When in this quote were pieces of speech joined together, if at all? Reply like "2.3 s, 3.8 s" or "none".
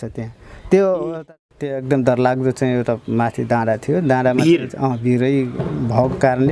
1.1 s